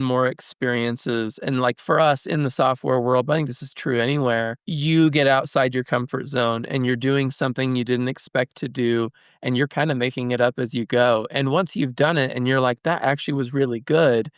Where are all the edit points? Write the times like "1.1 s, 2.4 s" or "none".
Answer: 4.6 s